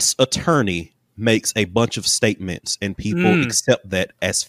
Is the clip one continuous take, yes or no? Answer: yes